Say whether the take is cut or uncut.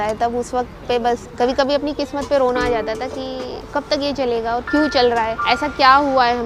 cut